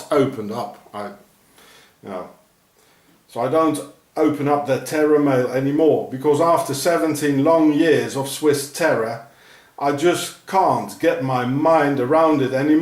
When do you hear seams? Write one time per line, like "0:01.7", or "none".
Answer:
none